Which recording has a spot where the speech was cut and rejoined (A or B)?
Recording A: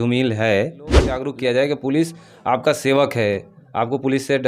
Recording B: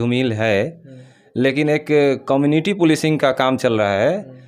A